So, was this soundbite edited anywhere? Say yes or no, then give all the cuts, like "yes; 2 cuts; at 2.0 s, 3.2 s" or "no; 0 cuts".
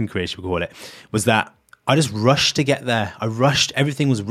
yes; 1 cut; at 1.6 s